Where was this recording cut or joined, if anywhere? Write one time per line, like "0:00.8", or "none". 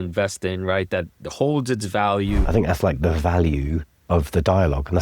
0:02.4
0:03.9